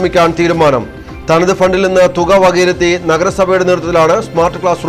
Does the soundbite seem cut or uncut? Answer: uncut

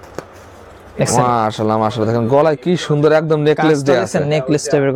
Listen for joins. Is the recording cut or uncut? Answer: uncut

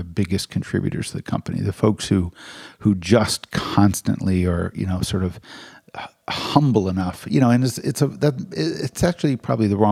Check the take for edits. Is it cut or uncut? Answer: uncut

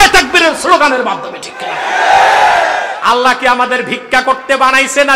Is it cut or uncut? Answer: cut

